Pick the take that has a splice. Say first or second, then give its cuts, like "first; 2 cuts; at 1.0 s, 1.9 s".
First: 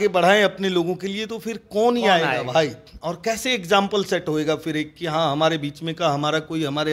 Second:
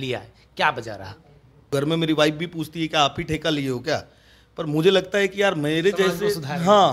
second; 1 cut; at 1.7 s